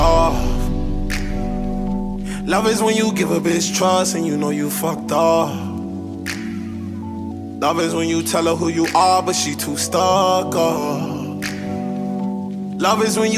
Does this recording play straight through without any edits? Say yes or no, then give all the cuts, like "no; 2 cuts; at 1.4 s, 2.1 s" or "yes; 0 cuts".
yes; 0 cuts